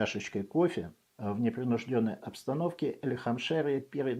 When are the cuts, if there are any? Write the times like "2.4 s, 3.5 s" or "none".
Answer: 1.0 s